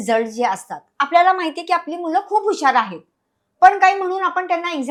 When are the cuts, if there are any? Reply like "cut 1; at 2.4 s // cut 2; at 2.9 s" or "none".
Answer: none